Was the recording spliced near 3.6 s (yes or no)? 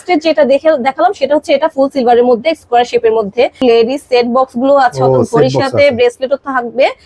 yes